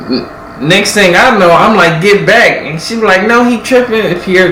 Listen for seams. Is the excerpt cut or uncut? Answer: uncut